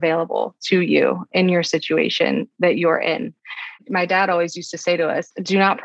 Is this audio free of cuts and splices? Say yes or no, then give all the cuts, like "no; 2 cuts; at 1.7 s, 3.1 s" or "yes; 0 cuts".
yes; 0 cuts